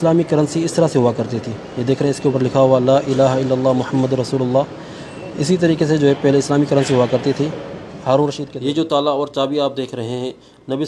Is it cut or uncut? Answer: cut